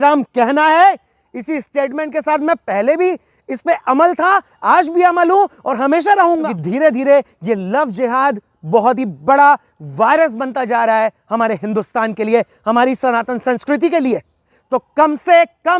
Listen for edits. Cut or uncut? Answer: cut